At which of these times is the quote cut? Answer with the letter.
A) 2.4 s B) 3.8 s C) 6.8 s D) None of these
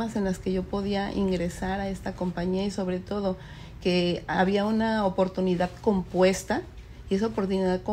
D